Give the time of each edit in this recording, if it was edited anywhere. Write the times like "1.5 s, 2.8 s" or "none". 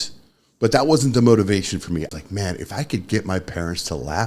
2.1 s